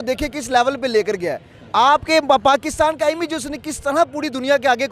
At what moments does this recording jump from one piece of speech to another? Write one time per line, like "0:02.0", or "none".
none